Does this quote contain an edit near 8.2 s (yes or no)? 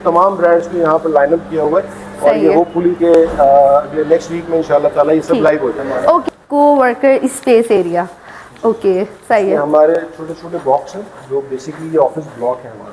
no